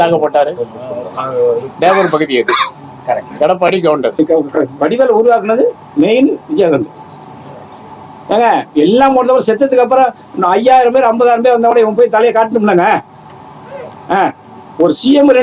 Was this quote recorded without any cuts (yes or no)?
no